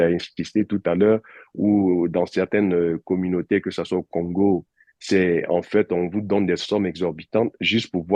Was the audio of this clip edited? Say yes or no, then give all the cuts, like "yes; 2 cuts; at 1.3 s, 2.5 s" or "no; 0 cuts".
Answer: no; 0 cuts